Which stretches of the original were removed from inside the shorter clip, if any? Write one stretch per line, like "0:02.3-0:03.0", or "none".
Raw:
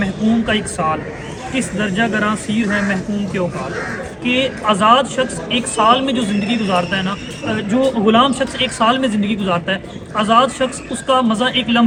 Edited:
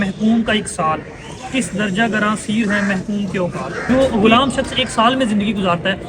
0:03.8-0:07.7